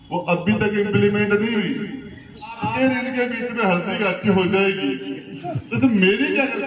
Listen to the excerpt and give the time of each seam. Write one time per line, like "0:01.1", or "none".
0:02.6